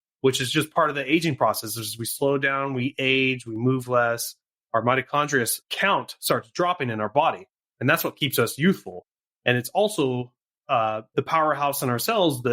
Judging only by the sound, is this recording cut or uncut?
cut